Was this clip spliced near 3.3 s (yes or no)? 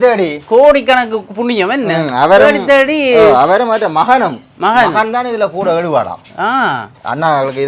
no